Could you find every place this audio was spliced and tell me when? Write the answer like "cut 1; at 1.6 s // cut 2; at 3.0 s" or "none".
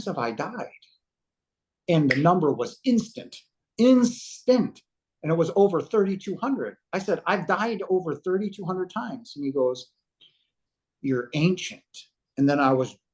none